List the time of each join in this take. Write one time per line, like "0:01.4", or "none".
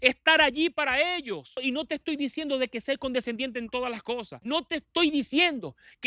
0:01.6
0:04.4